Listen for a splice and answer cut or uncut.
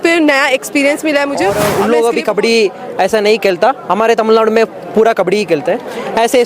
cut